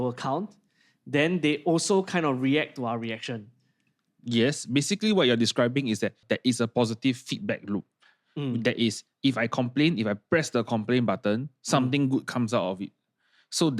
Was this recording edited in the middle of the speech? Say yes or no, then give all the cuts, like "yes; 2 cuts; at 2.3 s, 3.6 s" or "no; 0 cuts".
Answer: no; 0 cuts